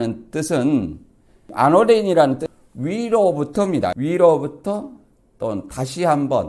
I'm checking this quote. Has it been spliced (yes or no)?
yes